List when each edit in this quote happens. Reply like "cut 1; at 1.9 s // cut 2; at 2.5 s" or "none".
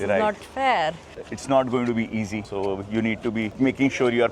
cut 1; at 1.3 s // cut 2; at 2.5 s // cut 3; at 3.5 s